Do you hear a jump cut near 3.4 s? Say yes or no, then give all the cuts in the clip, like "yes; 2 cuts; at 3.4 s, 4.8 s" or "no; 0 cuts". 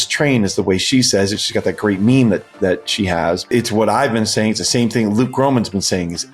yes; 1 cut; at 3.4 s